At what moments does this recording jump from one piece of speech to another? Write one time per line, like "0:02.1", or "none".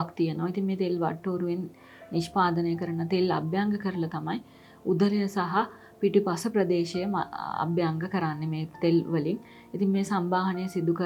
none